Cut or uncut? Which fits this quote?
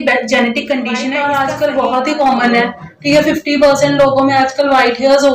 cut